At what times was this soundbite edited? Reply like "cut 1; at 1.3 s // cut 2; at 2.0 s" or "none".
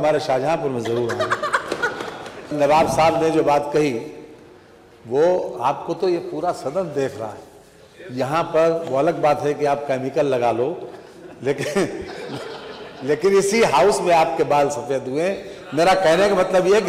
cut 1; at 2.5 s

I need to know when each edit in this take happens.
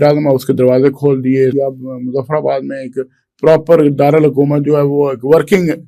cut 1; at 1.5 s

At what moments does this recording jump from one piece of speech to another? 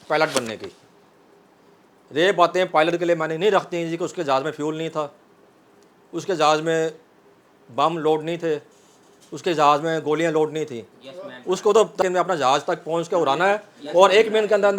cut 1; at 12.0 s

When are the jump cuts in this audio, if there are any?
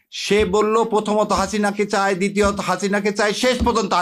none

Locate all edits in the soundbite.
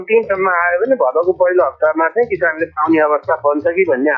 none

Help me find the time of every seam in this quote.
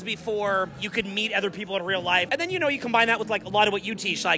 cut 1; at 2.3 s

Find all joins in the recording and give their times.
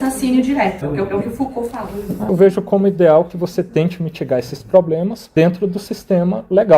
cut 1; at 0.8 s // cut 2; at 2.3 s // cut 3; at 5.2 s

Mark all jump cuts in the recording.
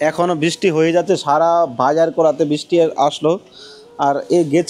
none

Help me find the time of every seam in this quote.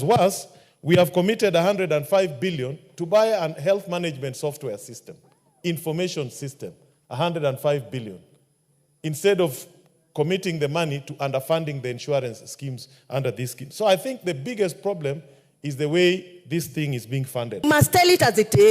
cut 1; at 17.6 s

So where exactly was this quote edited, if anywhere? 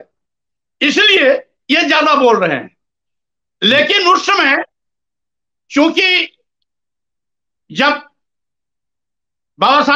none

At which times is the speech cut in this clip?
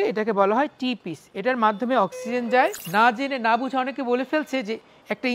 cut 1; at 2.8 s

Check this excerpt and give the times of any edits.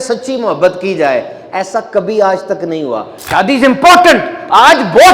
cut 1; at 3.1 s

